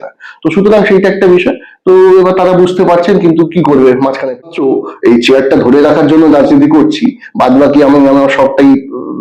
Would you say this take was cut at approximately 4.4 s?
yes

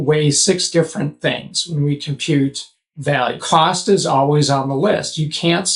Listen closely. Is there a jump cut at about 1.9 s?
no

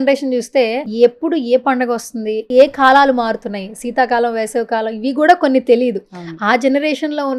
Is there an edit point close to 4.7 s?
no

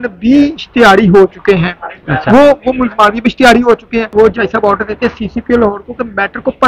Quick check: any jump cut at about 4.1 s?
yes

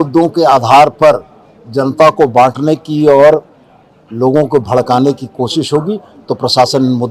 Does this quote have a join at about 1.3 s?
no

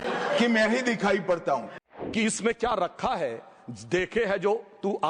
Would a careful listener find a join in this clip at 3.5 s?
no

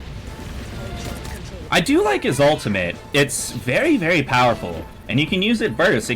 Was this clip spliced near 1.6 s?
yes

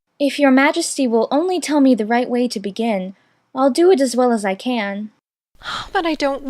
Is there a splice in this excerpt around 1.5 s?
no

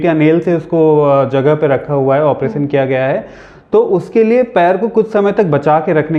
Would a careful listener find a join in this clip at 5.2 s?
no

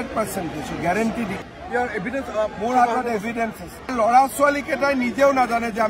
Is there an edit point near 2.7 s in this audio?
no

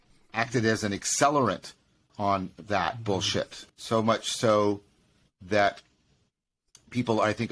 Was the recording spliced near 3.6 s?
yes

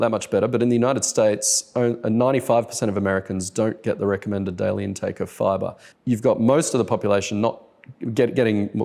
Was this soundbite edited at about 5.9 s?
yes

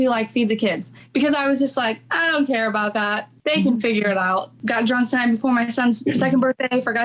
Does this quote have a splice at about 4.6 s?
yes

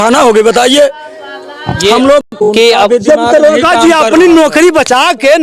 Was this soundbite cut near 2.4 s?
yes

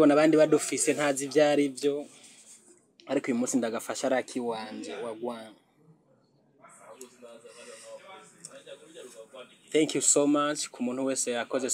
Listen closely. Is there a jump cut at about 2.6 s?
no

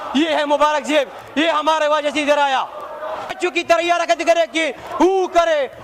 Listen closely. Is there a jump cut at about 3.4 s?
yes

